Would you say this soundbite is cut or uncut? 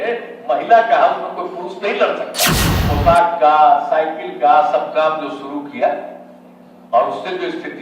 cut